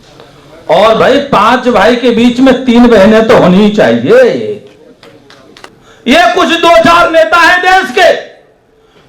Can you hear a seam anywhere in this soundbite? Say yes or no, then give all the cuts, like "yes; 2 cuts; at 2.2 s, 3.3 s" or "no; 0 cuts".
yes; 1 cut; at 5.7 s